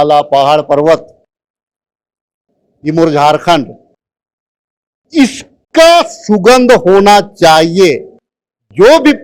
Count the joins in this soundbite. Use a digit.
0